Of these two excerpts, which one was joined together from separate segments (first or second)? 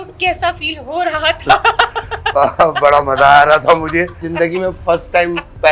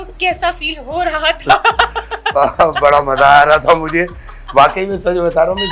first